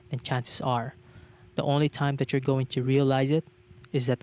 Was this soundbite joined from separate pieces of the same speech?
no; 0 cuts

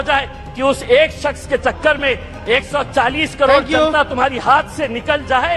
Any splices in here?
no; 0 cuts

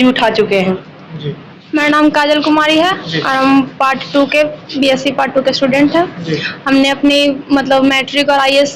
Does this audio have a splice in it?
yes; 1 cut; at 1.5 s

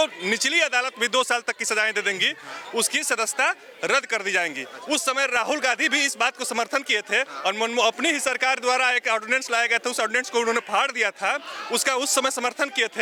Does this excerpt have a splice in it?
no; 0 cuts

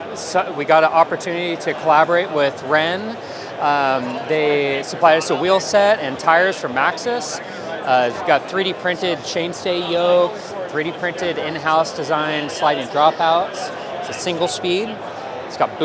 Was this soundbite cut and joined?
no; 0 cuts

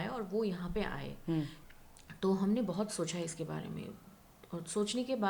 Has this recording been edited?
yes; 1 cut; at 1.6 s

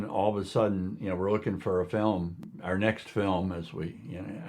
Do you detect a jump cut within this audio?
yes; 1 cut; at 2.4 s

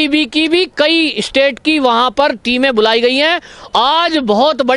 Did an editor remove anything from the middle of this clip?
no; 0 cuts

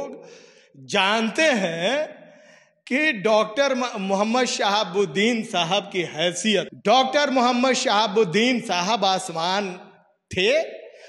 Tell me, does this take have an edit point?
yes; 1 cut; at 6.7 s

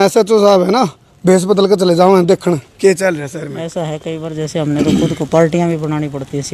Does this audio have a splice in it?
no; 0 cuts

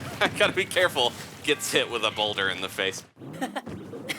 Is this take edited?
yes; 1 cut; at 3.0 s

